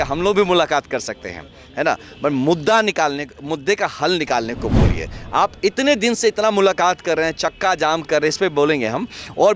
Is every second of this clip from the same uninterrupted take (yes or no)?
yes